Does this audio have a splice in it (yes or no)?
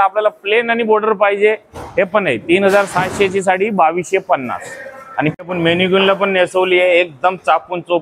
yes